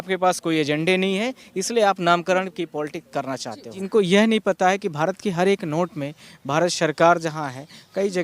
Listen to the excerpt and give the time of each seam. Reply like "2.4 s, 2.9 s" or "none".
3.8 s